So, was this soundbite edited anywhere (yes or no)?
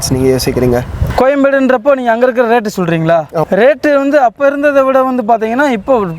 yes